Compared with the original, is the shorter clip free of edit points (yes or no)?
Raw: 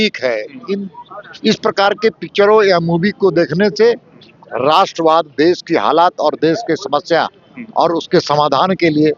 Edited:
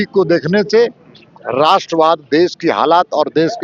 yes